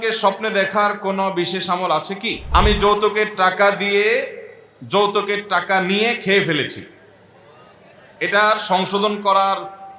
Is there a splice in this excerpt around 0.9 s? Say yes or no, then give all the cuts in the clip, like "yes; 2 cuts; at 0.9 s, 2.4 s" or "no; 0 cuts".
no; 1 cut; at 2.4 s